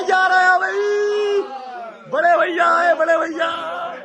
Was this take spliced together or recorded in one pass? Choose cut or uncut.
uncut